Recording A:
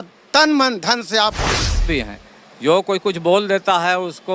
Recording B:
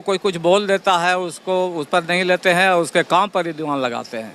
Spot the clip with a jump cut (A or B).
A